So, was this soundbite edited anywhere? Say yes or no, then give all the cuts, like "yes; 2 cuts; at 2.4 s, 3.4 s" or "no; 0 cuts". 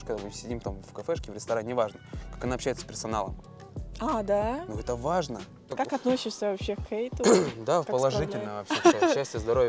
yes; 1 cut; at 5.8 s